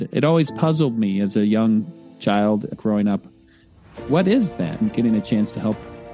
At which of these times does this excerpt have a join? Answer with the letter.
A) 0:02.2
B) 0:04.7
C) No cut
C